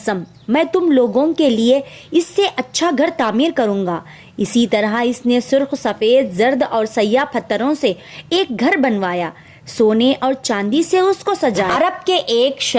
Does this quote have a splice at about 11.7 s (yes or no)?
yes